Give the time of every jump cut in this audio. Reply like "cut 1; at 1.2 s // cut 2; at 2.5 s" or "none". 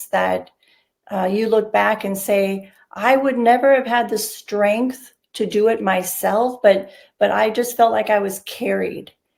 none